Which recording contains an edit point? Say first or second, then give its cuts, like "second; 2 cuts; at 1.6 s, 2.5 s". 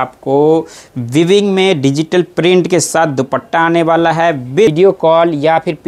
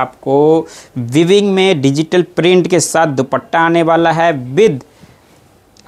first; 1 cut; at 4.7 s